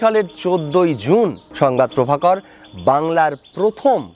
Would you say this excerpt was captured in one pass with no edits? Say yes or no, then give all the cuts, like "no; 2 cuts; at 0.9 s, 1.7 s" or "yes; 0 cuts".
no; 1 cut; at 1.4 s